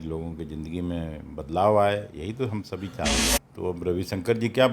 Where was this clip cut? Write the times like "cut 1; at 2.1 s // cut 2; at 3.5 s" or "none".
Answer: cut 1; at 3.2 s